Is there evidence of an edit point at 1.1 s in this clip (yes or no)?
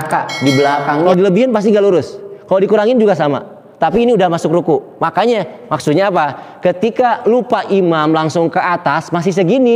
yes